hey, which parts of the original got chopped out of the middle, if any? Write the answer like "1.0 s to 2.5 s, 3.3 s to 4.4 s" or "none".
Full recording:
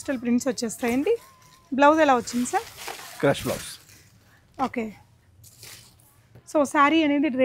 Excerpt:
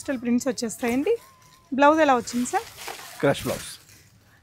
none

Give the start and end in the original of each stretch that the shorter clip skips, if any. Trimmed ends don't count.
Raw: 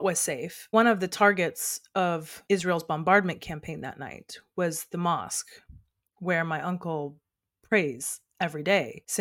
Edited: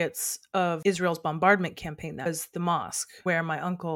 2.2 s to 2.4 s, 3.9 s to 4.6 s, 5.4 s to 6.0 s

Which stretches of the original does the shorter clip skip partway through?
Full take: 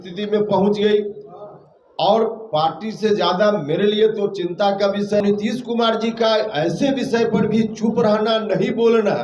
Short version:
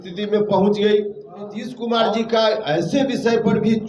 1.7 s to 5.6 s

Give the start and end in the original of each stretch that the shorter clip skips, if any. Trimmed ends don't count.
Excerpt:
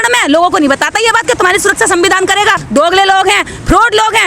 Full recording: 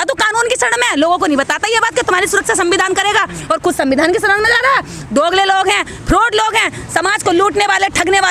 3.3 s to 5.0 s

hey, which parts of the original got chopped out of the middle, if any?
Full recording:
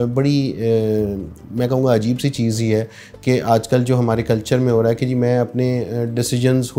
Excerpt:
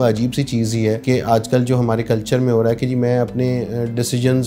2.9 s to 3.2 s

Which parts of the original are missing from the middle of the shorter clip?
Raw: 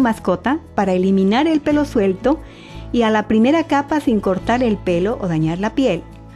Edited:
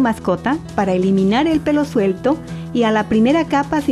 2.6 s to 2.7 s

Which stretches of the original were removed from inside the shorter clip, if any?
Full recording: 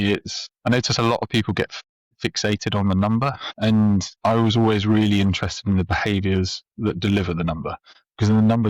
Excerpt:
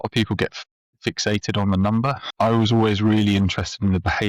3.4 s to 4.1 s

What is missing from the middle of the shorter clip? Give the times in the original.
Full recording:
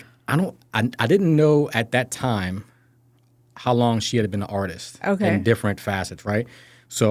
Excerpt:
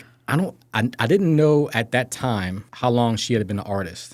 2.6 s to 3.5 s

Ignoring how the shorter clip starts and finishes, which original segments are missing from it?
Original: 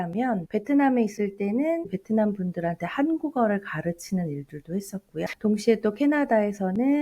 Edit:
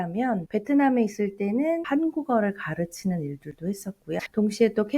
1.8 s to 2.9 s

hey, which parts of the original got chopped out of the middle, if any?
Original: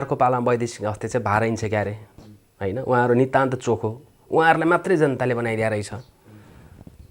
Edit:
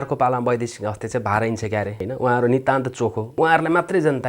2.0 s to 2.7 s, 3.9 s to 4.2 s

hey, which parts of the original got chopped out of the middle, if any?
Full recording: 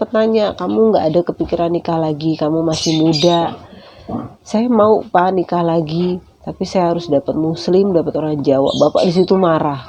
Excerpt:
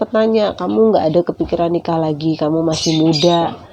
none

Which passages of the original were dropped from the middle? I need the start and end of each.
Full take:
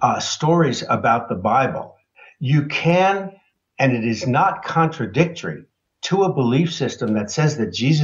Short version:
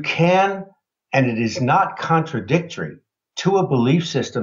none

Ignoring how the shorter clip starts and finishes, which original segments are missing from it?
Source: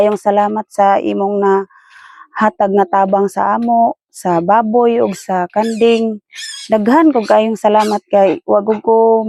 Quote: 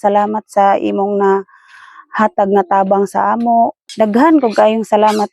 4.0 s to 6.5 s

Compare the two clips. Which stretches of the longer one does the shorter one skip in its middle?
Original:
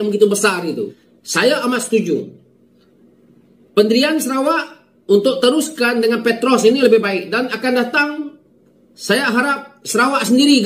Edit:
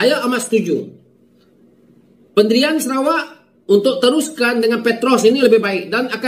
none

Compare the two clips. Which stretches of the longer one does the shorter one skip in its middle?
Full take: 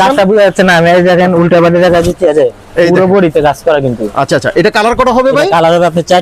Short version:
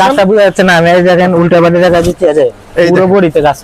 none

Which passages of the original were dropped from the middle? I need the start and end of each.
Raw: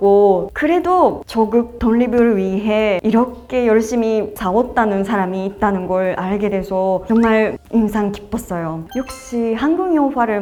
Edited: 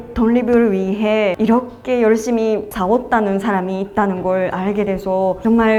none

